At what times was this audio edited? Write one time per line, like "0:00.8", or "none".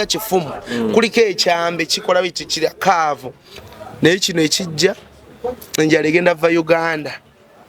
0:03.6